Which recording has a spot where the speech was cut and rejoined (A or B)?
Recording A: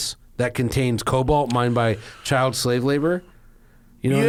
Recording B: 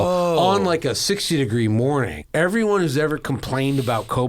B